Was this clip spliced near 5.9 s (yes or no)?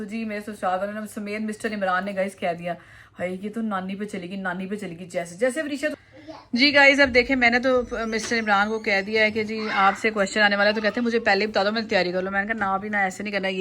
yes